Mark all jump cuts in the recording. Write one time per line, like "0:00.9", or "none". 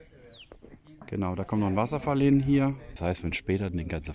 0:02.9